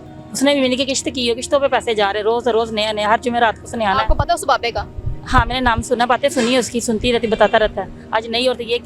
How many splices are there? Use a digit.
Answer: 0